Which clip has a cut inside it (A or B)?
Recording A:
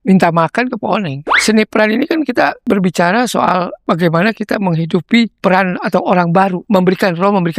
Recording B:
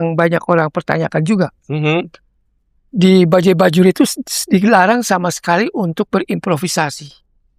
A